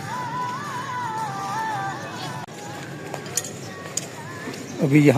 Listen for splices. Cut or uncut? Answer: uncut